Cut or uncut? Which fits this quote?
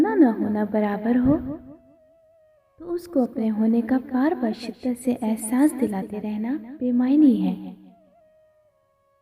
uncut